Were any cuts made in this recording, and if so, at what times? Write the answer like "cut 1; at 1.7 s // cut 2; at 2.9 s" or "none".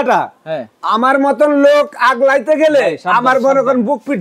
none